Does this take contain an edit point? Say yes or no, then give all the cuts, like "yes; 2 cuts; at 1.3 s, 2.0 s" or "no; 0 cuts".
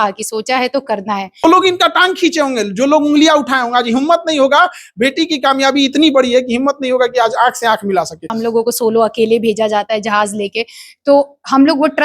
yes; 2 cuts; at 1.4 s, 8.3 s